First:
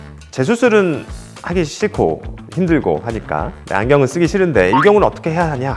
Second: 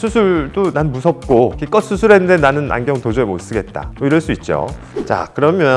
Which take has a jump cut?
second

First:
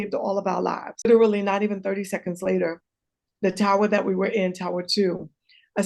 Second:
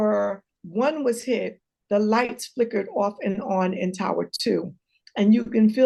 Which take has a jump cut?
first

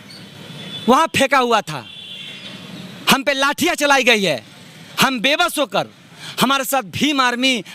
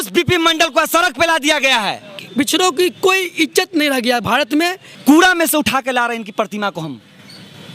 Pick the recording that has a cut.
second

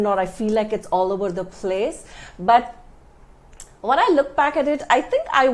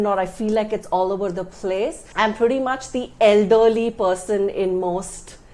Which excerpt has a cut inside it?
second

